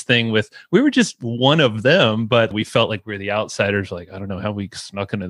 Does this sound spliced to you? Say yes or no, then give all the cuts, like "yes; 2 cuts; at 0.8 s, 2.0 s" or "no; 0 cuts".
yes; 1 cut; at 2.5 s